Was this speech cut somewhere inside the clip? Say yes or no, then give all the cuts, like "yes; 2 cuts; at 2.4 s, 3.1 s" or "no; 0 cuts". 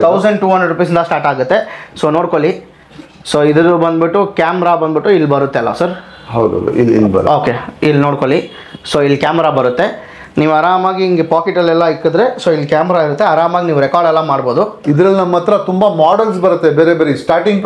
no; 0 cuts